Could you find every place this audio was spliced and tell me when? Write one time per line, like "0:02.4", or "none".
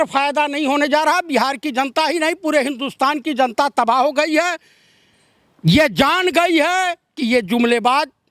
none